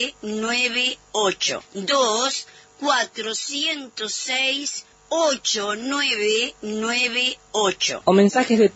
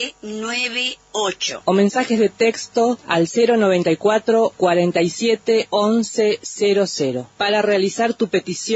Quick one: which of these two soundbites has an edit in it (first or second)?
second